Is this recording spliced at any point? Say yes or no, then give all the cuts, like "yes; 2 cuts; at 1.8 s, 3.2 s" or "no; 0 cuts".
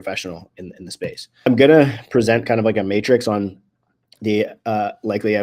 yes; 1 cut; at 1.5 s